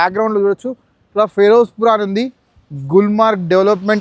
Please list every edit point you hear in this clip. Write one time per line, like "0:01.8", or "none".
none